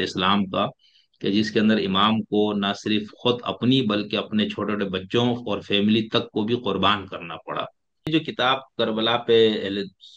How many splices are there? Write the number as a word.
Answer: one